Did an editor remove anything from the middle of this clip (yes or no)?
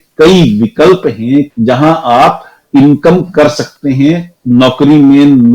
yes